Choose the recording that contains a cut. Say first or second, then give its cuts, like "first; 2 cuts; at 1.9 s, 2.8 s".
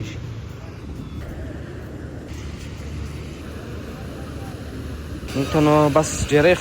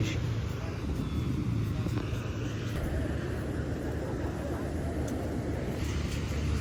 first; 3 cuts; at 1.2 s, 2.3 s, 3.4 s